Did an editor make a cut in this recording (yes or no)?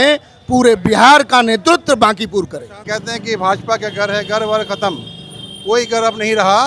yes